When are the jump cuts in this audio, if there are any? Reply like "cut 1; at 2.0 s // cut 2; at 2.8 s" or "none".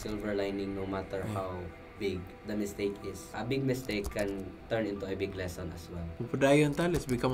cut 1; at 3.3 s // cut 2; at 6.1 s